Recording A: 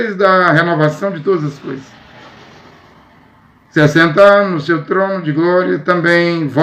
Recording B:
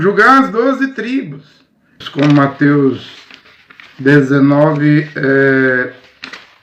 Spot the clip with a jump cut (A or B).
B